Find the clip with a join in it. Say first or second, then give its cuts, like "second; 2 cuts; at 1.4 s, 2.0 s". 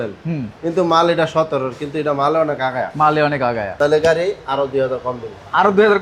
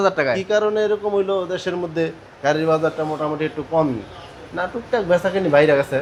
first; 1 cut; at 3.7 s